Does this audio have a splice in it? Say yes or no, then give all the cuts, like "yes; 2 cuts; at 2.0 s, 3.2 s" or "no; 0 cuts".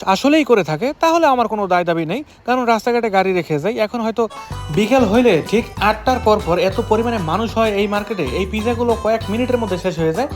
yes; 1 cut; at 4.4 s